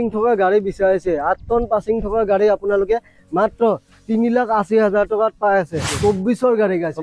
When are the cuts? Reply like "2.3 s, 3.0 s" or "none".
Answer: 5.9 s